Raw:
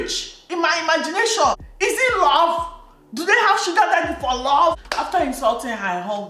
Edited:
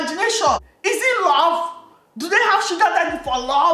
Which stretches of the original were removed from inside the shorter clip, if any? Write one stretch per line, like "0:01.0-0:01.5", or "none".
none